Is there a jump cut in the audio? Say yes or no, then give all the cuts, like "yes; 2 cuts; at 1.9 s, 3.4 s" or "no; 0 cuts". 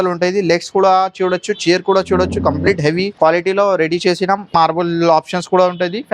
yes; 2 cuts; at 3.1 s, 4.5 s